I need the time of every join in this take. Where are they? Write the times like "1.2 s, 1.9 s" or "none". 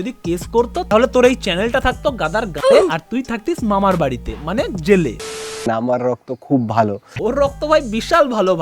5.2 s